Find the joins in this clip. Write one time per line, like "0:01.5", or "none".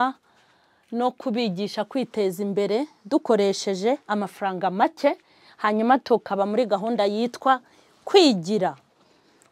none